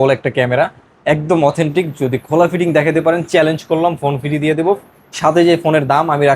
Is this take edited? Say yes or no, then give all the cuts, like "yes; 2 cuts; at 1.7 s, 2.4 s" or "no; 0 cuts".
no; 0 cuts